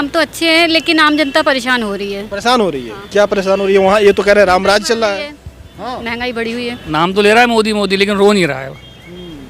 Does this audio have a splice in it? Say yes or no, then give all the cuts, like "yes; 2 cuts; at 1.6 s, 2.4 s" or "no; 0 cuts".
yes; 1 cut; at 6.8 s